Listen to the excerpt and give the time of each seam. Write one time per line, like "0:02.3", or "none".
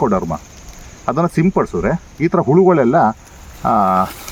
none